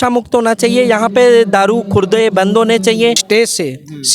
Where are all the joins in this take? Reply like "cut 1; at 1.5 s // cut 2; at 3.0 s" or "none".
cut 1; at 3.2 s

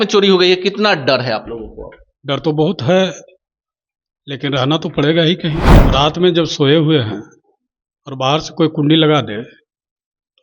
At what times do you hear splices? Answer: cut 1; at 5.7 s

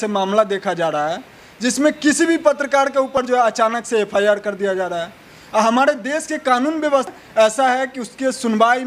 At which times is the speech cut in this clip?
cut 1; at 3.2 s // cut 2; at 7.1 s

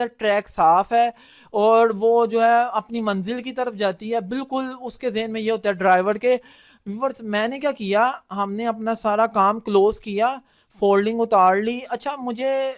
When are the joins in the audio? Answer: none

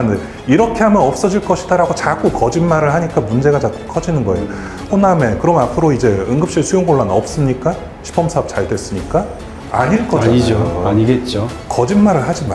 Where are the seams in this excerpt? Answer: cut 1; at 11.6 s

